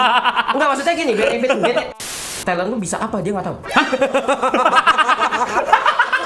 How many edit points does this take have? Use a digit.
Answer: 2